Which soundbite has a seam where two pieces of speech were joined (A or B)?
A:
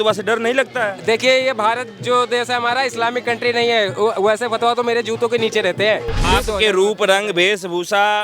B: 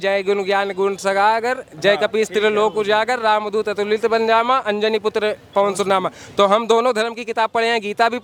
A